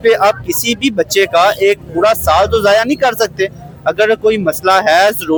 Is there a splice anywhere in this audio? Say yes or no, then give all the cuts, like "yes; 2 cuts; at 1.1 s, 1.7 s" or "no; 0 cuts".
no; 0 cuts